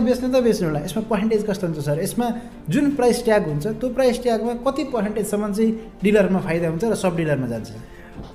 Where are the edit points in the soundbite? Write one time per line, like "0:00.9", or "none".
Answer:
none